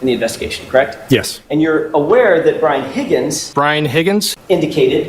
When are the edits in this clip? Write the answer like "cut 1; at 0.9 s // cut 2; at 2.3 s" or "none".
cut 1; at 1.4 s

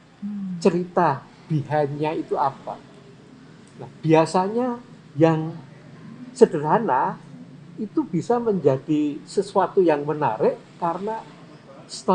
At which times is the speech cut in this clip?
none

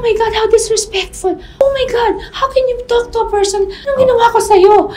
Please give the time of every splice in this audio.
cut 1; at 1.5 s // cut 2; at 3.8 s

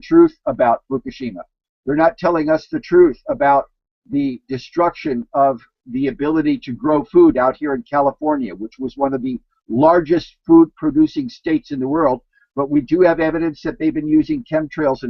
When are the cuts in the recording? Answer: none

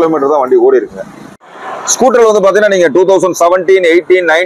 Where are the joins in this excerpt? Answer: cut 1; at 1.8 s

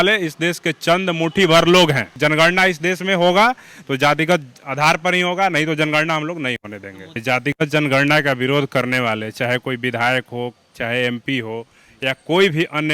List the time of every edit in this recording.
cut 1; at 2.1 s // cut 2; at 7.2 s

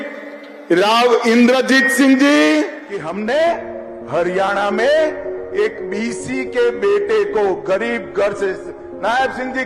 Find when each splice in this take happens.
cut 1; at 2.8 s

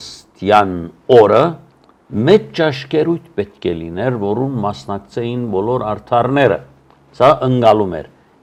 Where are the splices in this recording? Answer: none

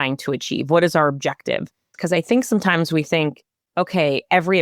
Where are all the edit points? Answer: cut 1; at 1.8 s

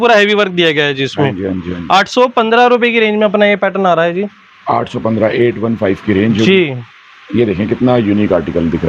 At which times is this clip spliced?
none

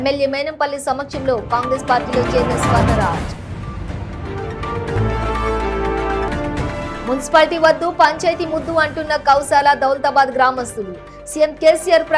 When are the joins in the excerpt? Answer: none

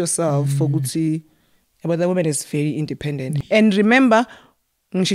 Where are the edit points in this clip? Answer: cut 1; at 3.4 s

